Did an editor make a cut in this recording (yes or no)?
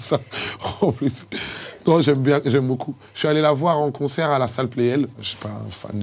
no